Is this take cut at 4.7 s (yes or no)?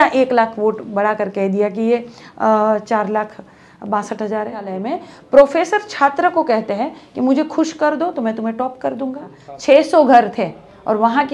yes